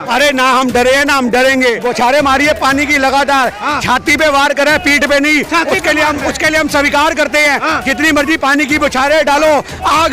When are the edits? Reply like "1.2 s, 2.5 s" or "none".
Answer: 1.8 s